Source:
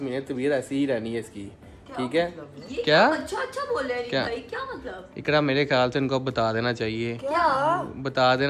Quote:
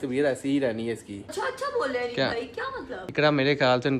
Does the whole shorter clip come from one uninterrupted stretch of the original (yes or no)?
no